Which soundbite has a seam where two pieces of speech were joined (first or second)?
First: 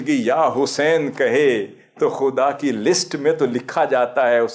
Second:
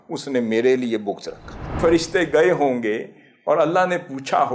second